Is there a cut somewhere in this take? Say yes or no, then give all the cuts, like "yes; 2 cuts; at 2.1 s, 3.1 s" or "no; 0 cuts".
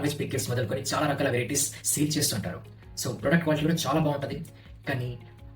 no; 0 cuts